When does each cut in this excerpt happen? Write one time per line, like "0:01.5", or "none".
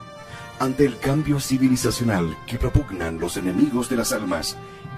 0:01.0